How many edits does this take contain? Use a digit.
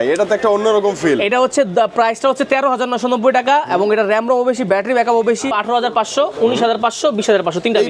1